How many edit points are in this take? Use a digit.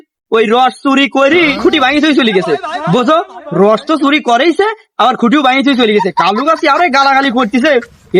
0